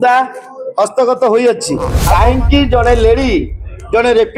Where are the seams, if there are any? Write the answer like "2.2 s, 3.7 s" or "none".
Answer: 2.0 s